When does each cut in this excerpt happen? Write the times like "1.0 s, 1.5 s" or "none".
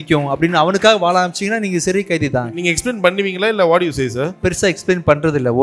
2.6 s, 4.4 s